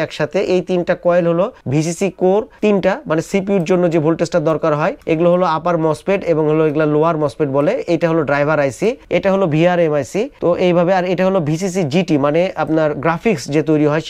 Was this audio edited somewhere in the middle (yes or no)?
no